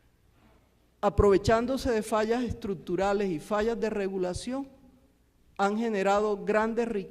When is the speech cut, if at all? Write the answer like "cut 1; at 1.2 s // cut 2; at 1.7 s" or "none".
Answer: cut 1; at 4.2 s

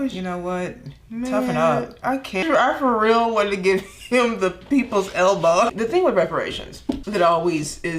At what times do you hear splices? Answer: cut 1; at 2.4 s // cut 2; at 5.7 s // cut 3; at 7.0 s

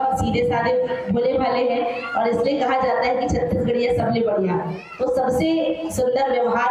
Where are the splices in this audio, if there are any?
none

